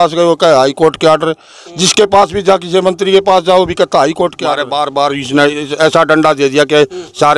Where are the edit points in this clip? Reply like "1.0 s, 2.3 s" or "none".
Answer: 4.6 s